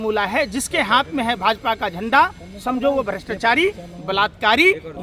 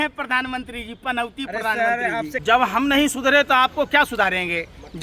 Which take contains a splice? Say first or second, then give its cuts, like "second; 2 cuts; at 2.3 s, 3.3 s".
second; 1 cut; at 2.4 s